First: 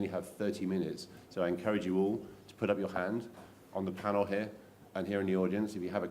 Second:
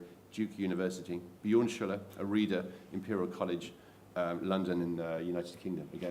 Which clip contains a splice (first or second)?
first